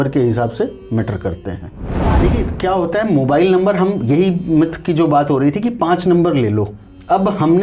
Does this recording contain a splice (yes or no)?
yes